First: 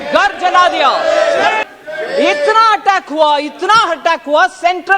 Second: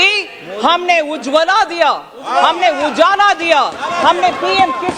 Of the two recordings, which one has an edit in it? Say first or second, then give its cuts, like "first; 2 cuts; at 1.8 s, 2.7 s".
first; 1 cut; at 1.6 s